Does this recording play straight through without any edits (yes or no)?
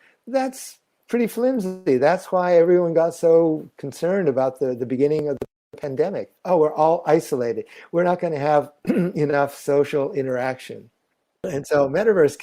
no